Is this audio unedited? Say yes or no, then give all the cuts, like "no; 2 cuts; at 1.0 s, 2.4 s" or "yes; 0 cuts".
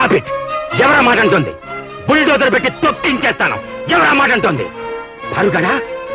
yes; 0 cuts